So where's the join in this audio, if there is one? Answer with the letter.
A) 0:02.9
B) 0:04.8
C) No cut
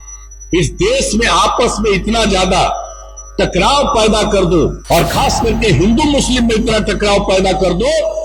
B